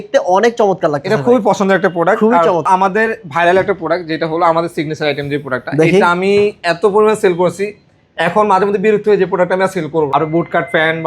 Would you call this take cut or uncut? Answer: cut